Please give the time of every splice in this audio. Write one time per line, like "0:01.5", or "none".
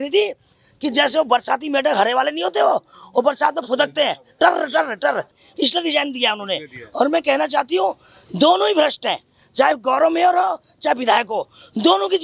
0:05.4